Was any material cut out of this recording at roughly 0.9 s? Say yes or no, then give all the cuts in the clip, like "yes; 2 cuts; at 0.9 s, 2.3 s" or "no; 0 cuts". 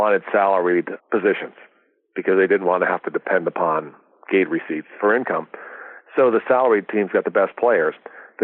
yes; 2 cuts; at 0.9 s, 4.9 s